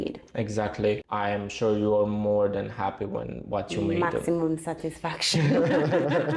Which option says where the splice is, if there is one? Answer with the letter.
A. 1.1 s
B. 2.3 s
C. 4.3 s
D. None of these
A